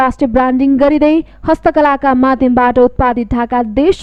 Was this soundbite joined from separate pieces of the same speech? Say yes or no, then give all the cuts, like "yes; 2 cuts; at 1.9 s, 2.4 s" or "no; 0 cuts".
no; 0 cuts